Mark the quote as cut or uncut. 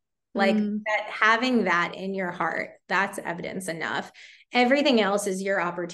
uncut